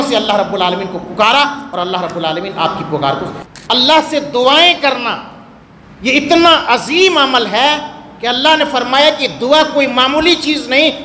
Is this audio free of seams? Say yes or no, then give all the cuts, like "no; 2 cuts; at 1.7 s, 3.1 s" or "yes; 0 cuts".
no; 1 cut; at 3.4 s